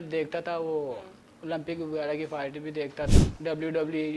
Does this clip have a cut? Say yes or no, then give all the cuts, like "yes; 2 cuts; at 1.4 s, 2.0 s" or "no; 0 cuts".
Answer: yes; 1 cut; at 3.1 s